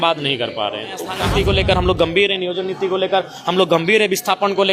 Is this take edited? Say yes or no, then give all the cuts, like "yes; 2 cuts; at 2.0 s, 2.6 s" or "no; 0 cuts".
yes; 1 cut; at 1.2 s